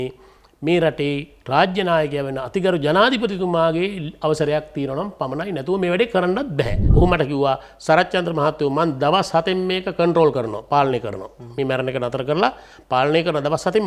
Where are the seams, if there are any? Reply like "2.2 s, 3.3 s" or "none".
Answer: 6.8 s